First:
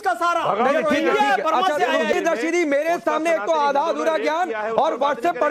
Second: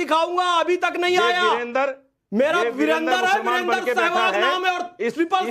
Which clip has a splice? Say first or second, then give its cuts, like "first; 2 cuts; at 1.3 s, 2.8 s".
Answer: first; 1 cut; at 2.1 s